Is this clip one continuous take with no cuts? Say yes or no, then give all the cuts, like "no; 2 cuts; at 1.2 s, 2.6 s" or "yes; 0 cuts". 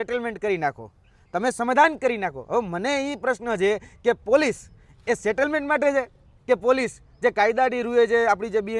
yes; 0 cuts